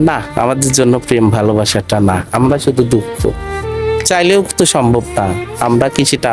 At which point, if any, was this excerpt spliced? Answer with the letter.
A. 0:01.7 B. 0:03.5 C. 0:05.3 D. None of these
B